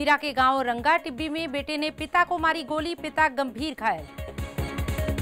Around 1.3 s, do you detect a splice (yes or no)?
no